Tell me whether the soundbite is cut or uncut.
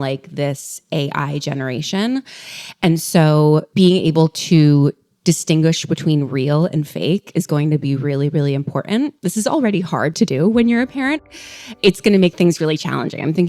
cut